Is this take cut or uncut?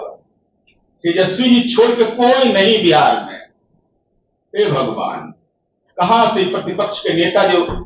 uncut